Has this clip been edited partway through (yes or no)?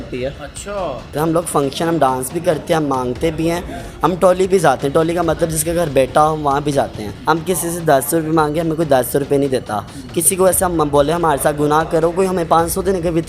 yes